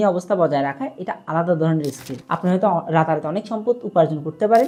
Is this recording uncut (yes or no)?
yes